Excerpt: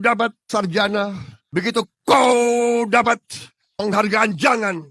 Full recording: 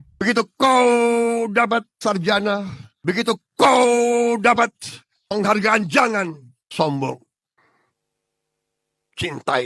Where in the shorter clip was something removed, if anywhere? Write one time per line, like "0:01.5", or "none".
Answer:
none